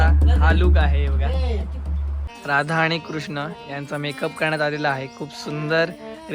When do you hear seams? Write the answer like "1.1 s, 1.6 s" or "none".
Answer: 2.2 s